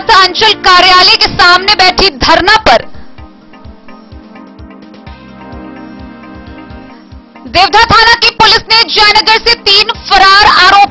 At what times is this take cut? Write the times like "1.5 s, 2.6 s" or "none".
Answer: none